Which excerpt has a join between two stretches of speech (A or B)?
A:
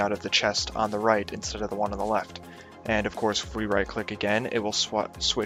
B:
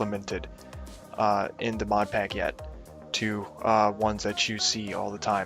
B